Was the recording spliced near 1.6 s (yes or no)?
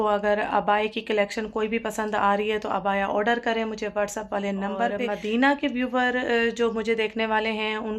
no